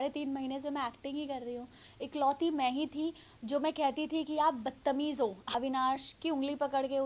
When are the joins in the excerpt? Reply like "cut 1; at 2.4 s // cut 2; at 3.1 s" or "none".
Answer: cut 1; at 1.8 s // cut 2; at 5.4 s